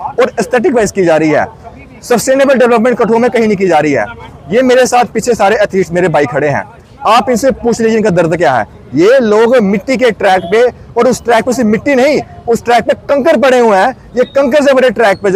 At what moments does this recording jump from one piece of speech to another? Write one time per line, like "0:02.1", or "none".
none